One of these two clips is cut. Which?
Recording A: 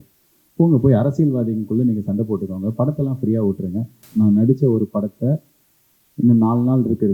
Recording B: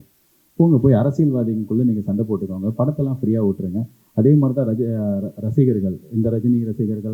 A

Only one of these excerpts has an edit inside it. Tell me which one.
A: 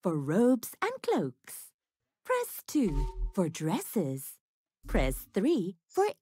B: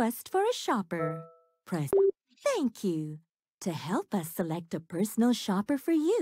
B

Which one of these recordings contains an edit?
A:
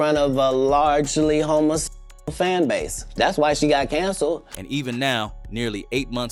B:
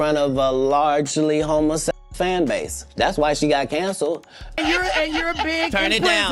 B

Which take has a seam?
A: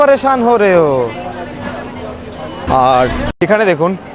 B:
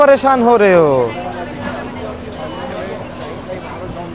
A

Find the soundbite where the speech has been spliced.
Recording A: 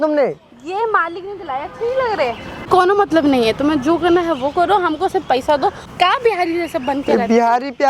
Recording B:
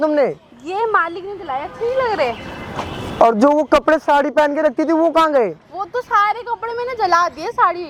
A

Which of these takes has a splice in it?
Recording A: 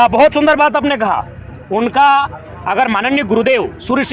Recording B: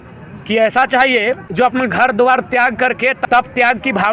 B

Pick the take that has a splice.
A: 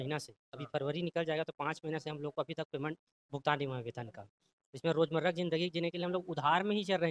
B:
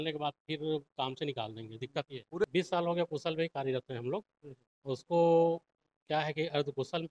B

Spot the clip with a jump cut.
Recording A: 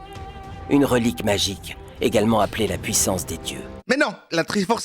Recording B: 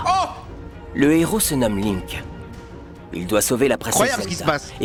A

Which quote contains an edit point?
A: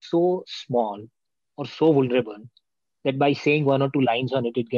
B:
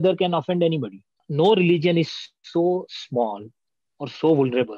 B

